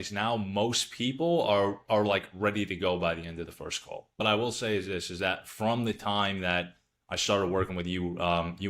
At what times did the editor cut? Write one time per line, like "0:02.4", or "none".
0:04.2

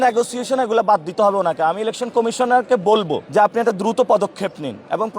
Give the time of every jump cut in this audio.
0:03.2

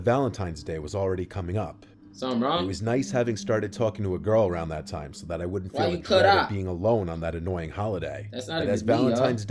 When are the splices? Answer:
none

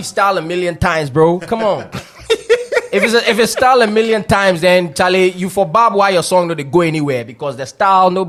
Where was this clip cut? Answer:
none

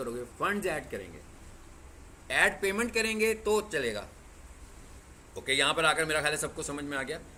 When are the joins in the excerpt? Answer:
none

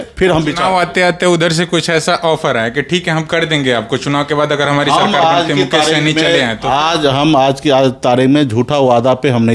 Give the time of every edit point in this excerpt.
none

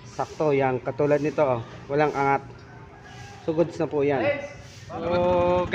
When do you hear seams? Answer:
0:04.5

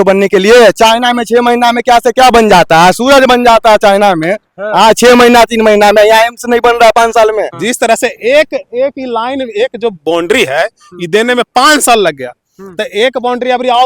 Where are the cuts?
0:07.6

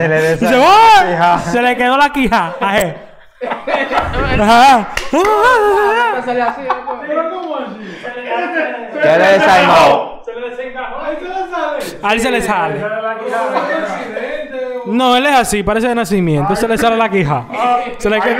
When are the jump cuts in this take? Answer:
none

